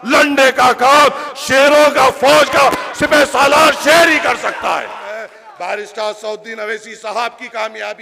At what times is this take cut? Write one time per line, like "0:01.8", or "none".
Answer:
0:05.4